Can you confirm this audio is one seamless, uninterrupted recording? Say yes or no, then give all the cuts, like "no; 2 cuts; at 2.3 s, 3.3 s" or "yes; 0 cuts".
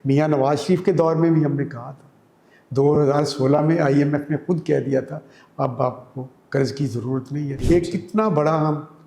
no; 1 cut; at 7.5 s